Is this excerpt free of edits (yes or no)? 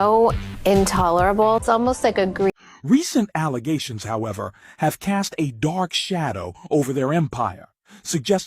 no